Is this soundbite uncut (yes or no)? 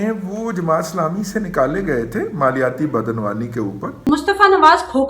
no